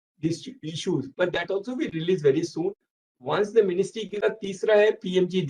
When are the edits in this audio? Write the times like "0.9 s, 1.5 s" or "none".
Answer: 4.2 s